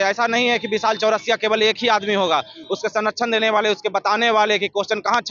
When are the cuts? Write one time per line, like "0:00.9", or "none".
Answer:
none